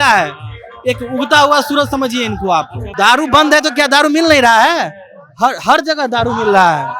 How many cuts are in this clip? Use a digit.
1